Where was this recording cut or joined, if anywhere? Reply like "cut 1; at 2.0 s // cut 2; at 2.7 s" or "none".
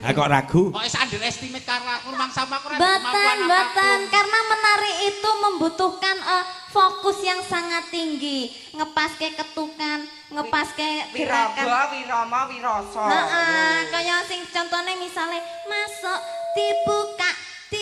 none